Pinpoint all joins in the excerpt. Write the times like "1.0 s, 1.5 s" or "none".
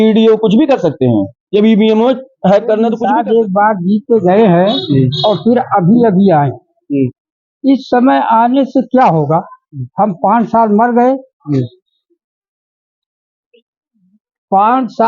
3.0 s